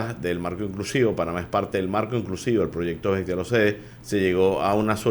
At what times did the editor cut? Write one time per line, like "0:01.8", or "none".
0:03.9

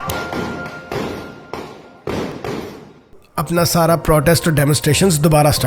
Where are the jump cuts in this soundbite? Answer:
0:03.3

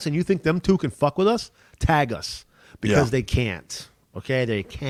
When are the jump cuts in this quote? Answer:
none

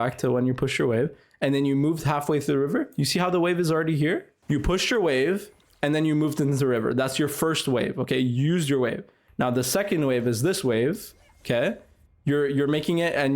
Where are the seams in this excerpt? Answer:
0:04.3

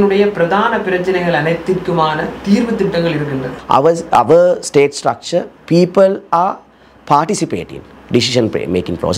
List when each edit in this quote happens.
0:03.5

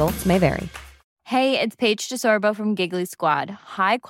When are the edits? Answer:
none

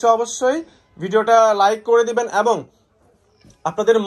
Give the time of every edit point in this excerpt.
none

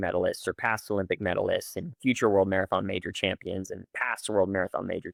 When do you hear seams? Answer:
none

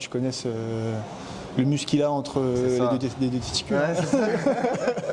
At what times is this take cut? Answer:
none

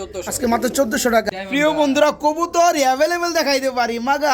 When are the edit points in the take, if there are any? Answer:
0:01.3

